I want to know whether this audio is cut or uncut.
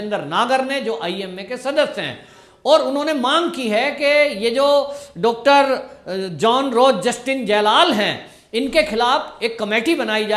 uncut